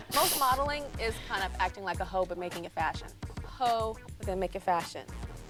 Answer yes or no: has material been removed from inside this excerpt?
no